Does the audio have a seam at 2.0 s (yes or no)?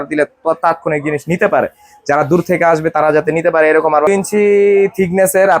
no